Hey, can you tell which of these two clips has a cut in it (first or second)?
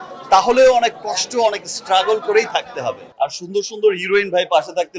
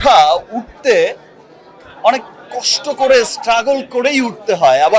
first